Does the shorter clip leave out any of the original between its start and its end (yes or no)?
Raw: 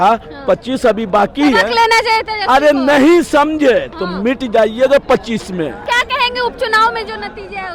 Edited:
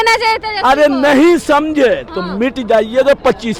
no